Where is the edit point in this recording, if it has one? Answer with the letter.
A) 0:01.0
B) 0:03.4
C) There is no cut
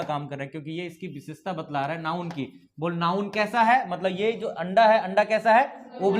C